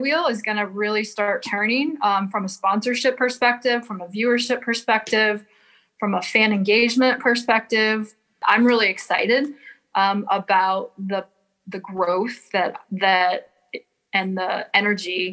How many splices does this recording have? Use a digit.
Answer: 1